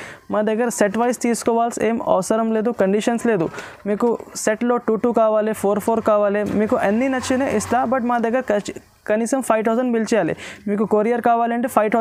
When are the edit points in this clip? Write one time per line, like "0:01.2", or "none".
none